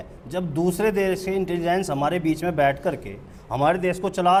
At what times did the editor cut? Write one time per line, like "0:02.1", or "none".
none